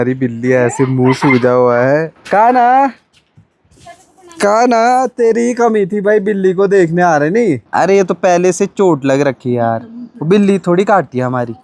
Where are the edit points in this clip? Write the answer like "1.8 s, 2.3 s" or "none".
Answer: 2.2 s, 7.6 s

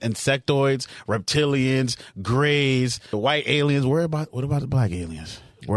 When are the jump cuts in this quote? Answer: 3.1 s

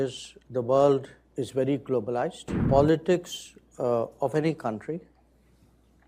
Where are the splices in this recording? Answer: 2.6 s

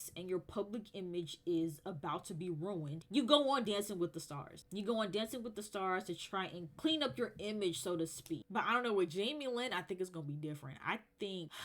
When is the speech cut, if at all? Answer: 8.4 s

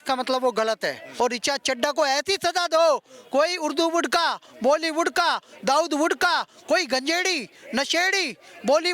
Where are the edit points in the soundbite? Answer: 1.0 s

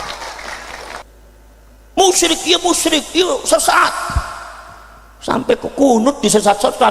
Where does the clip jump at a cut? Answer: 1.0 s

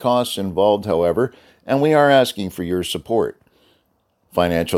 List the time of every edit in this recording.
none

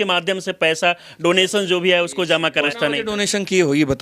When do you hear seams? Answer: 2.7 s

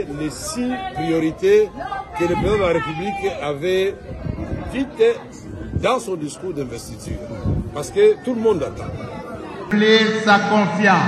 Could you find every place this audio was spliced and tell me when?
9.7 s

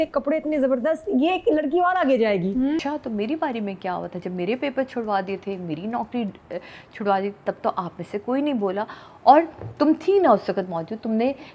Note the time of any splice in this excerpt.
2.8 s

